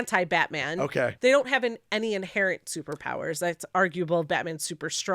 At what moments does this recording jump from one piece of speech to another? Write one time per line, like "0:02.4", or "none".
0:01.1